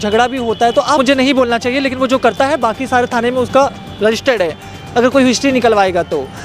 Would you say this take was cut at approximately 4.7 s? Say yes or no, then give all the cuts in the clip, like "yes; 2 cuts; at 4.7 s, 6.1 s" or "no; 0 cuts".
no; 1 cut; at 1.0 s